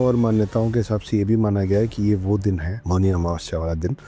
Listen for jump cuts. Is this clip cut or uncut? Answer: cut